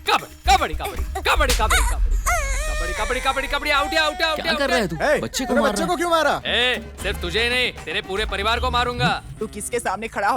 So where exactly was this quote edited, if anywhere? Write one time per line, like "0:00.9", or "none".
0:06.4
0:09.3